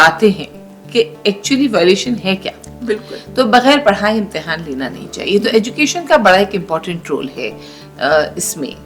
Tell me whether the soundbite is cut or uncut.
uncut